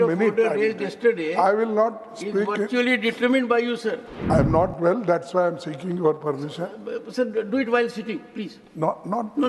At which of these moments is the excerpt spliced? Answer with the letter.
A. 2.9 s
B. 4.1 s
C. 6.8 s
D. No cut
B